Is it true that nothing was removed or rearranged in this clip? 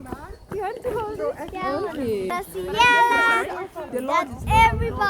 no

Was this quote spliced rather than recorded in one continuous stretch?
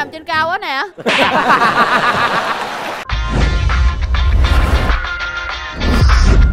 yes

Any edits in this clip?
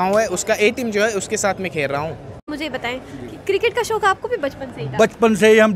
yes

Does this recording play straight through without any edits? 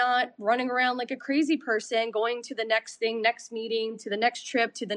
yes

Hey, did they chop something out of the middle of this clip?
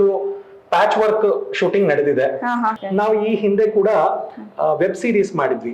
yes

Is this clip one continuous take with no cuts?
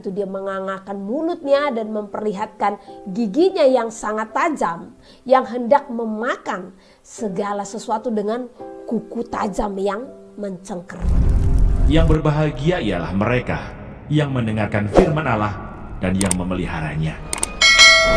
no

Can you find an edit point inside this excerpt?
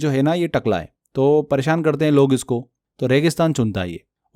yes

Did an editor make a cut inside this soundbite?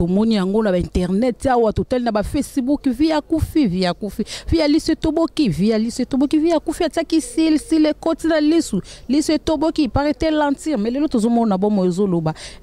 no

